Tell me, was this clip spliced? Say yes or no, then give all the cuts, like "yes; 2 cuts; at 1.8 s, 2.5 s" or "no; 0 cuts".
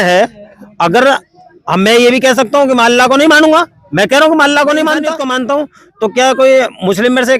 yes; 1 cut; at 5.2 s